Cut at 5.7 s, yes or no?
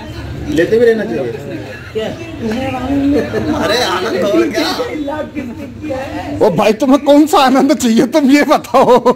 no